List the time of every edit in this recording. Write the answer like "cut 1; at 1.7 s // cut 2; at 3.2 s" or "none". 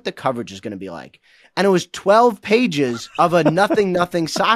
cut 1; at 3.0 s